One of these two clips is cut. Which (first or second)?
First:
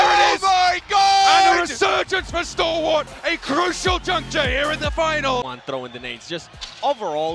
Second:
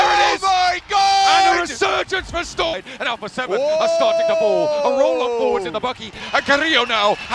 second